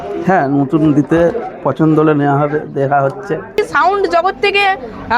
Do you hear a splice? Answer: yes; 1 cut; at 3.6 s

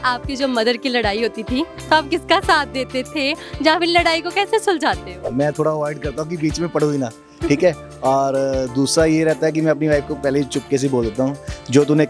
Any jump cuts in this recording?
no; 0 cuts

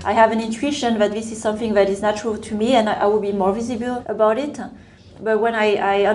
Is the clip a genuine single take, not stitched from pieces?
no; 2 cuts; at 2.0 s, 4.1 s

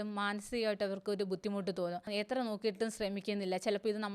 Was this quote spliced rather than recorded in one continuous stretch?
yes; 1 cut; at 2.1 s

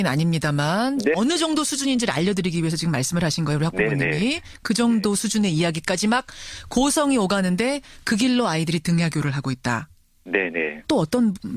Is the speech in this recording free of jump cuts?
yes; 0 cuts

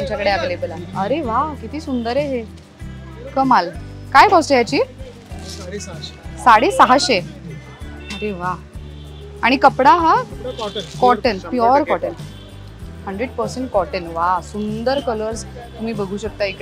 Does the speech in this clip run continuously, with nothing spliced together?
yes; 0 cuts

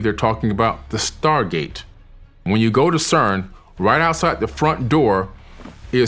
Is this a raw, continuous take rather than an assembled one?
no; 1 cut; at 2.4 s

